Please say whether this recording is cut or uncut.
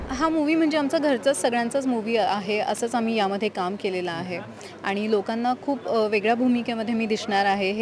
uncut